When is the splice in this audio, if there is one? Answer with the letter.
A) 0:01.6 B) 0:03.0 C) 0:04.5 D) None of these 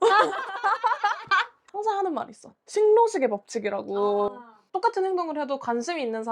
A